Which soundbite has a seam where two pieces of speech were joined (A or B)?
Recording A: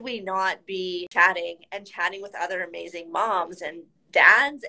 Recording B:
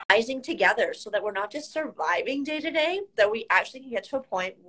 A